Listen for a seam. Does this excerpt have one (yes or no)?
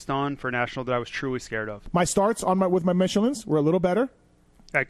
yes